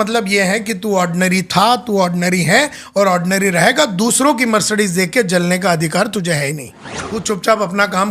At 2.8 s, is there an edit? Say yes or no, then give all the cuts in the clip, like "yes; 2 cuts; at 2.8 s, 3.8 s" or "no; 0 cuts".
no; 1 cut; at 7.0 s